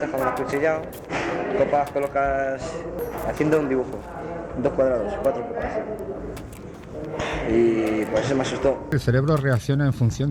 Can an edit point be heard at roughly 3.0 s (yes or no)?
yes